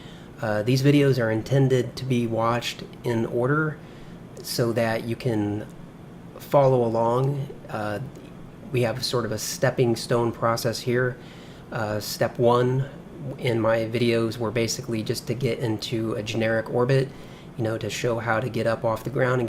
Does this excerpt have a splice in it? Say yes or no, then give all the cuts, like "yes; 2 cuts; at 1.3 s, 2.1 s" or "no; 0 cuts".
no; 0 cuts